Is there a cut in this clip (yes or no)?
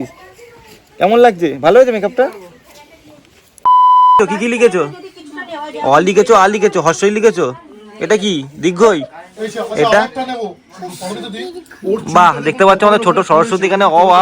yes